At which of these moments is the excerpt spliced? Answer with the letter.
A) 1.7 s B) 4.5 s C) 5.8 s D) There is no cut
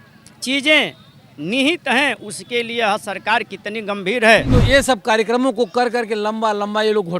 B